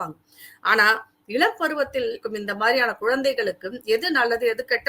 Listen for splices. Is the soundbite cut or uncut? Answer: cut